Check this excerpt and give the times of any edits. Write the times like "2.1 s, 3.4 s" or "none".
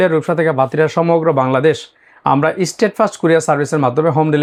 none